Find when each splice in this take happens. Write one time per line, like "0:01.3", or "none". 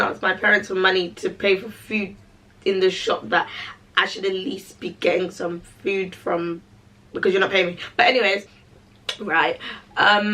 none

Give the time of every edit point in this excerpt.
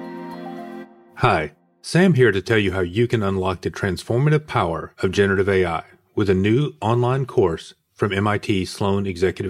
0:01.0

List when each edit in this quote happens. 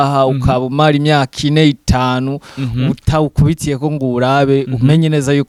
none

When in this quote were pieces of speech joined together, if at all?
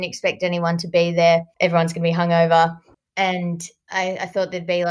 0:01.5

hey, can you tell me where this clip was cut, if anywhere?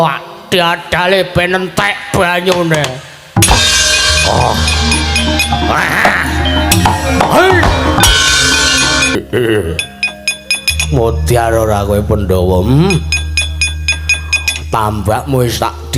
0:09.2

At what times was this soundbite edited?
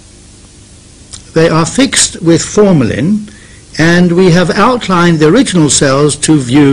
0:04.1

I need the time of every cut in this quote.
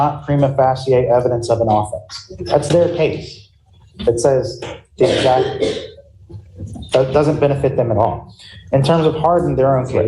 0:02.7

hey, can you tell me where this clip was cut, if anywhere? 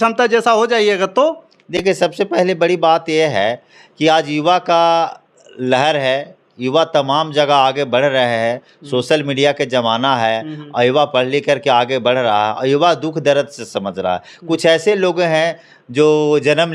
none

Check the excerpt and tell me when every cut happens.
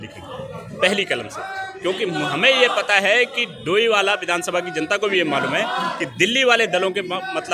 none

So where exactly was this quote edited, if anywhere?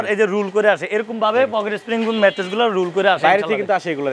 none

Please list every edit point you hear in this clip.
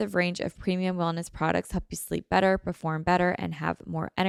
none

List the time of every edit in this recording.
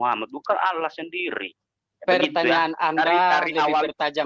none

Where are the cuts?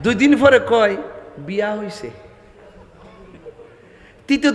none

